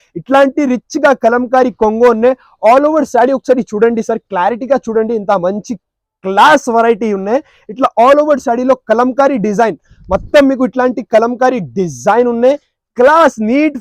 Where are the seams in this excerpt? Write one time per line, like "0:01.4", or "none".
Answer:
none